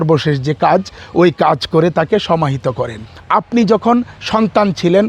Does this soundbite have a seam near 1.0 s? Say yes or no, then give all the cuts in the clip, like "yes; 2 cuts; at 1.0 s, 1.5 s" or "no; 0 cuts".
no; 1 cut; at 3.1 s